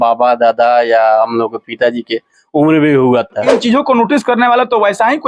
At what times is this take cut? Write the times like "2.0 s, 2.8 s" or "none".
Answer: 3.6 s

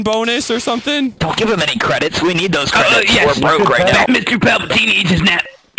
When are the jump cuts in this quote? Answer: 4.1 s

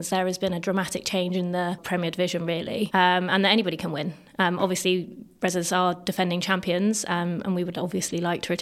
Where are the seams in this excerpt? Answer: 1.8 s, 2.9 s

